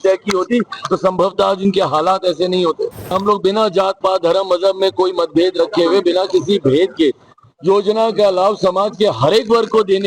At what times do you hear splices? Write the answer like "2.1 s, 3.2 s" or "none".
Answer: 3.2 s